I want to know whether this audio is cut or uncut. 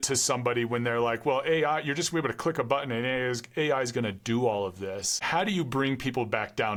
uncut